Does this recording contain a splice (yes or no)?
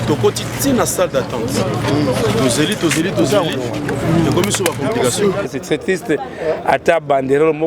yes